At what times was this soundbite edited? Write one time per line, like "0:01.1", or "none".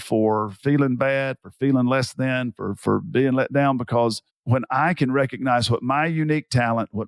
0:04.3